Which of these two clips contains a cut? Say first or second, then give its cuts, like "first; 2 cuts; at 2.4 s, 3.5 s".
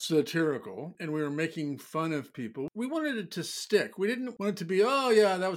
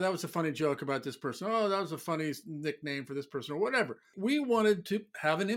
first; 3 cuts; at 0.9 s, 2.7 s, 4.3 s